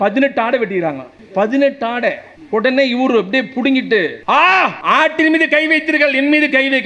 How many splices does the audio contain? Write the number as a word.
four